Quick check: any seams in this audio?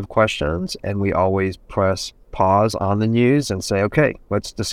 yes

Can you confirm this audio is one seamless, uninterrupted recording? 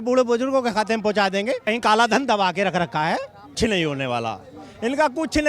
no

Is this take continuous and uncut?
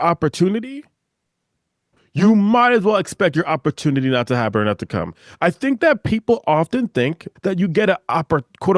no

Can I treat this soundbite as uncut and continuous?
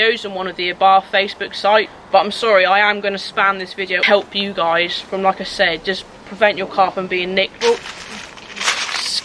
no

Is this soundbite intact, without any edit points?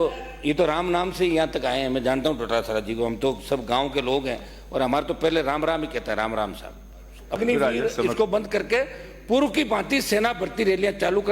no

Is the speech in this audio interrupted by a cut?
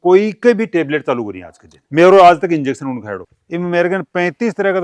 yes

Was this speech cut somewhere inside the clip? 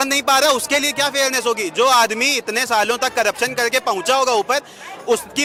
no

